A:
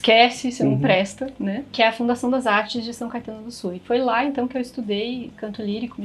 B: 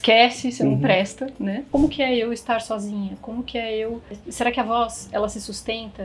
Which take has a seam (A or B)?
B